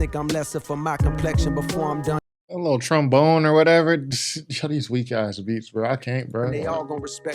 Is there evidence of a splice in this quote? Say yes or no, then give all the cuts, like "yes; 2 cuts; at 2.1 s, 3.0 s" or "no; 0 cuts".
no; 0 cuts